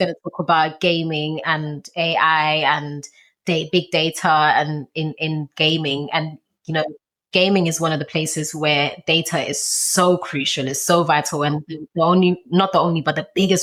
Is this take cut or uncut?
uncut